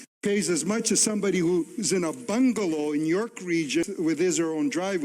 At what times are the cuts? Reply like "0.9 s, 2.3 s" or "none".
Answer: 3.8 s